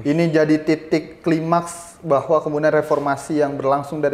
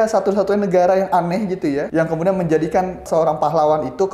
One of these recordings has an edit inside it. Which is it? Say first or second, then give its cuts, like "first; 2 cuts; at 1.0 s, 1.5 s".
second; 2 cuts; at 1.9 s, 3.0 s